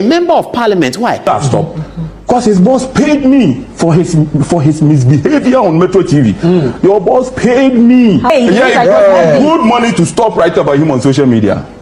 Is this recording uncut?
no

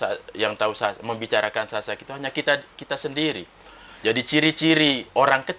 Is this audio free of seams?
yes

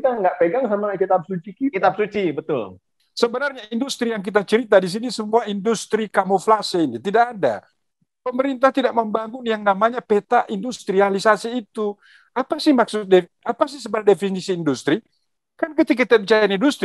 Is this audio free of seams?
no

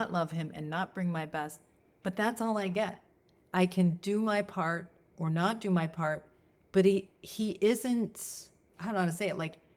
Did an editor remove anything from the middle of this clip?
no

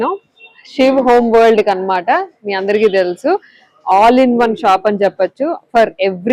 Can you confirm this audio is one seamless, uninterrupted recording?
yes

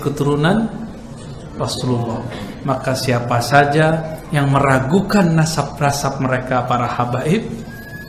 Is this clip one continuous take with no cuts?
yes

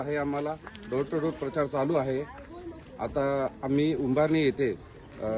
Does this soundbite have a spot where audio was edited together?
no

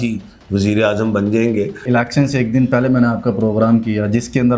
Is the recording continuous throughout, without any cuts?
no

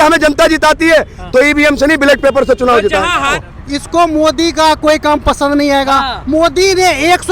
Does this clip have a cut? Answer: yes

